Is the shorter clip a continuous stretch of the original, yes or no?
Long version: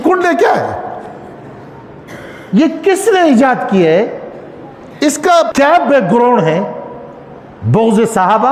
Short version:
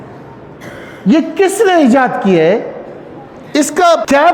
yes